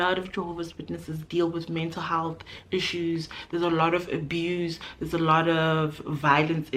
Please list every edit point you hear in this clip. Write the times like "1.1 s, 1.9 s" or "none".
none